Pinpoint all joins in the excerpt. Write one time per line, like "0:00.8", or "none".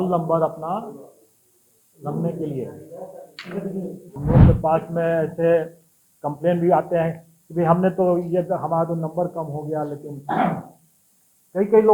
0:04.2